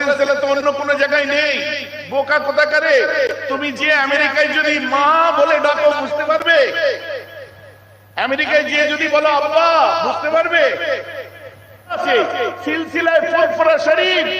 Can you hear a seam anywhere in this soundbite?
yes; 1 cut; at 12.0 s

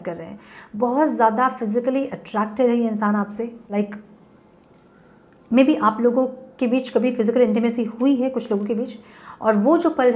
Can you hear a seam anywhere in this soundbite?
yes; 1 cut; at 3.7 s

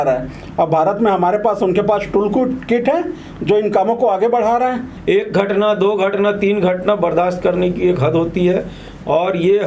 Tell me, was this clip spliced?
yes; 1 cut; at 4.9 s

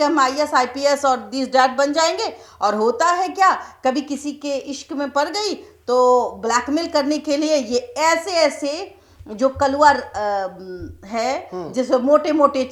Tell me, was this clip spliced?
no; 0 cuts

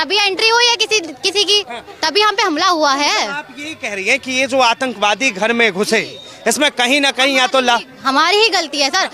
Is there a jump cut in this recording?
no; 0 cuts

